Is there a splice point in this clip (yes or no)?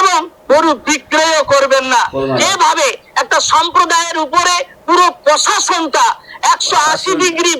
yes